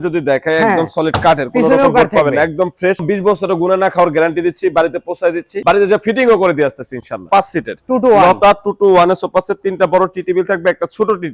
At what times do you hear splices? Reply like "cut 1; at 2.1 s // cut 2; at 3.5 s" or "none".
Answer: cut 1; at 3.0 s // cut 2; at 7.2 s

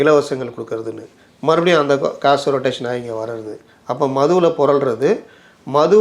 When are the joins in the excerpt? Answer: cut 1; at 2.8 s

